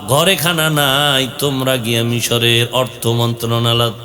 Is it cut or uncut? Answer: uncut